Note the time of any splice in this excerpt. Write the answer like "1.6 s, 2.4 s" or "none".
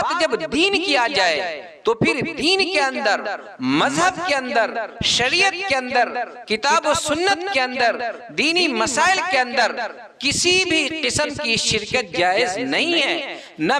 none